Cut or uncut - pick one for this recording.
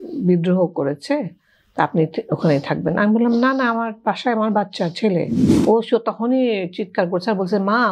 cut